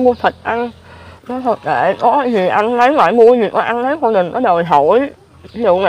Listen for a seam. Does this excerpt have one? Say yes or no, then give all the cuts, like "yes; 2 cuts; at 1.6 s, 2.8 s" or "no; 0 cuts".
no; 0 cuts